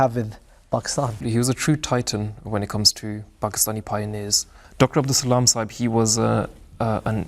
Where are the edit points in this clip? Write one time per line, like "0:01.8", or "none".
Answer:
0:01.2
0:04.6

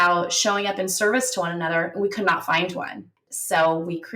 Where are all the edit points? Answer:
0:03.2

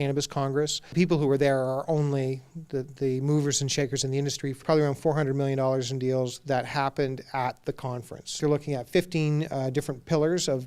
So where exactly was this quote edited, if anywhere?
0:00.9
0:04.6
0:08.4

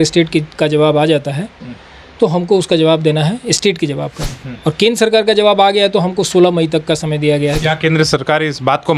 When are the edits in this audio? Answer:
0:07.6

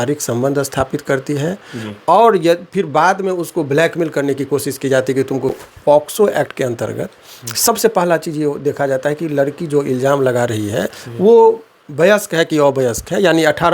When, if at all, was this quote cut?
0:05.5

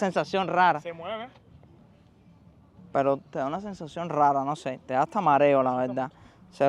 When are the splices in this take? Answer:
none

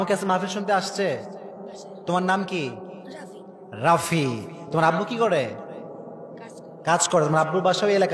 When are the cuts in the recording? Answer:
none

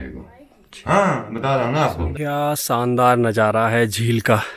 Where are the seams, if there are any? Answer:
0:02.1

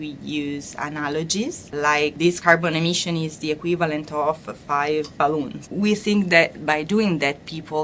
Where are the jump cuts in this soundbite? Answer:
0:01.9
0:05.6

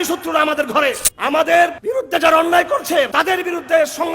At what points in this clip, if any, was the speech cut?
0:01.1
0:01.8
0:03.1

